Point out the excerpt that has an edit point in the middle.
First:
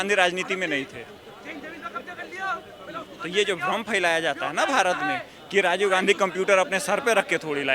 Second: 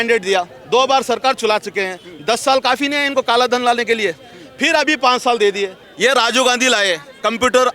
second; 1 cut; at 5.8 s

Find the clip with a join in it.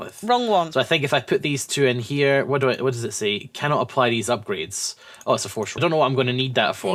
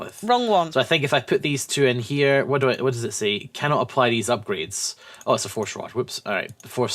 second; 1 cut; at 5.8 s

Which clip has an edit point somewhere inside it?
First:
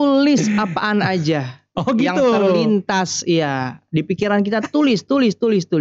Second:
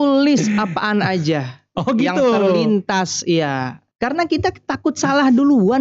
second; 1 cut; at 3.8 s

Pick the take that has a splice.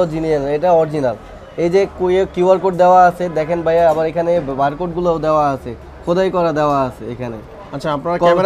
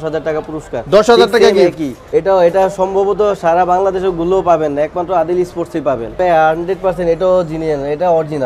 second; 2 cuts; at 1.9 s, 6.2 s

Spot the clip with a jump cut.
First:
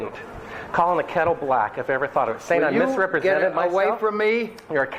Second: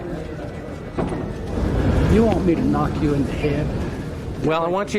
second; 1 cut; at 1.5 s

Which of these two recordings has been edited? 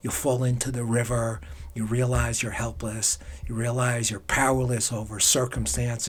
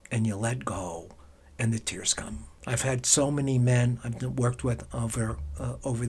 second; 1 cut; at 2.5 s

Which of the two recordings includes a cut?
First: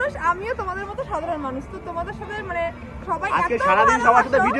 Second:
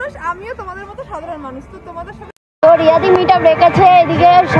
second; 1 cut; at 2.4 s

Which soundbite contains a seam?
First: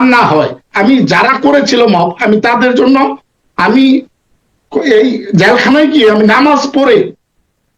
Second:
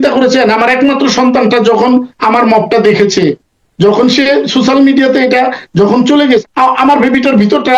second; 1 cut; at 6.4 s

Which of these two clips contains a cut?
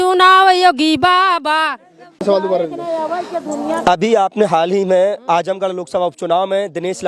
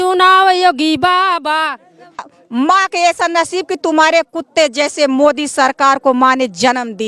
second; 1 cut; at 2.2 s

